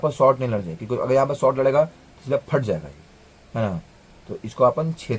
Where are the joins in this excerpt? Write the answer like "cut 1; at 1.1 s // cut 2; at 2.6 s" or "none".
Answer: none